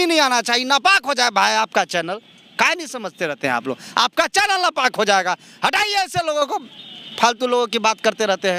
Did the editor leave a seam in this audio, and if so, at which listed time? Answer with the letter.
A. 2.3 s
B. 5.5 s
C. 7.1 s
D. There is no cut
D